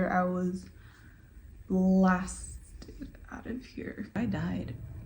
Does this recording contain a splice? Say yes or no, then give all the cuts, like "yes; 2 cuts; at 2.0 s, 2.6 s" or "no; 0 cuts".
yes; 1 cut; at 4.2 s